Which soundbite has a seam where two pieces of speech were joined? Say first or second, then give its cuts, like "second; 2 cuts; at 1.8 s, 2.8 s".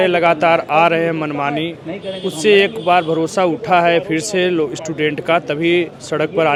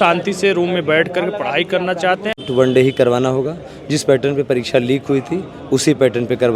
second; 1 cut; at 2.3 s